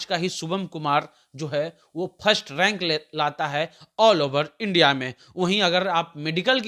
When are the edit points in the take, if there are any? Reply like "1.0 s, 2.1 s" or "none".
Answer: none